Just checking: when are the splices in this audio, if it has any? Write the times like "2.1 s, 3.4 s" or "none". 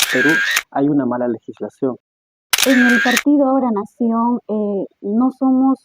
2.0 s